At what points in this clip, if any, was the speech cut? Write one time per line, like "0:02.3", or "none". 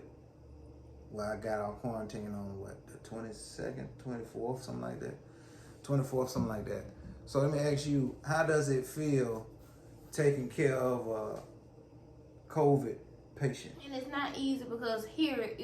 0:14.0